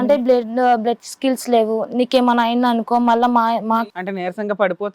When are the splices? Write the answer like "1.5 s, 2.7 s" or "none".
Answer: 3.8 s